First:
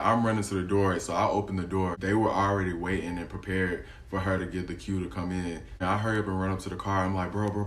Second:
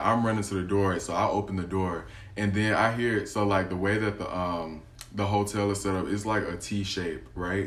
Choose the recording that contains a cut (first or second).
first